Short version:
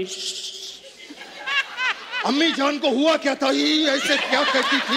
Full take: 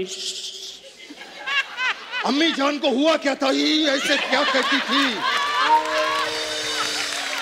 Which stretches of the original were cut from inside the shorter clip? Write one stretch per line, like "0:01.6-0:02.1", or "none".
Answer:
none